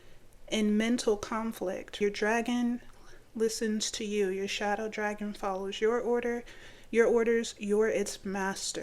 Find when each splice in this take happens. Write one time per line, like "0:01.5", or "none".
0:01.9